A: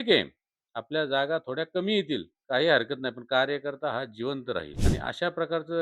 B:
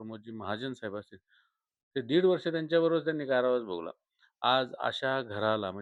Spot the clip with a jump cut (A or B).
A